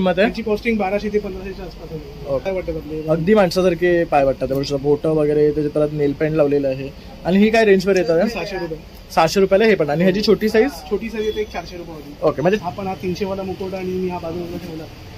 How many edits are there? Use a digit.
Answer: 2